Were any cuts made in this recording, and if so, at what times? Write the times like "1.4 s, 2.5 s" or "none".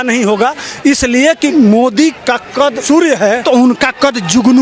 1.5 s, 2.8 s, 3.4 s

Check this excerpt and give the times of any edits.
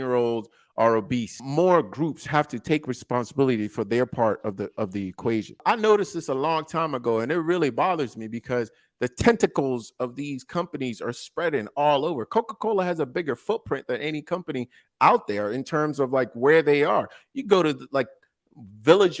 1.4 s, 5.5 s

